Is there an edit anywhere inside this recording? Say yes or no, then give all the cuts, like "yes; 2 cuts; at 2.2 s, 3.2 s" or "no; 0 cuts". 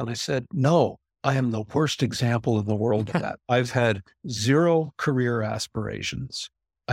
no; 0 cuts